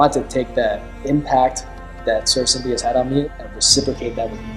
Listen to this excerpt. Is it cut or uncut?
cut